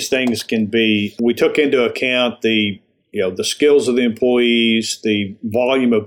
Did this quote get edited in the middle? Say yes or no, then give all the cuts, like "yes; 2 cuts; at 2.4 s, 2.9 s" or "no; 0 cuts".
yes; 1 cut; at 1.1 s